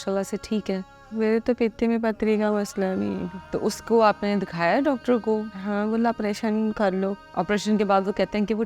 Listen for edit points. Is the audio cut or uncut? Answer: cut